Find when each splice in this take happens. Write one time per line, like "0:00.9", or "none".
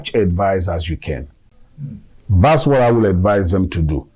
none